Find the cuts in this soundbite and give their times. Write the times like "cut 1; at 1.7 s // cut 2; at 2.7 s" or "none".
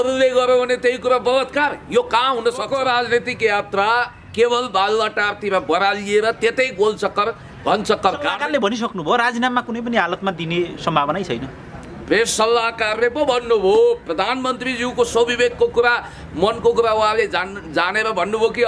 cut 1; at 2.7 s // cut 2; at 8.3 s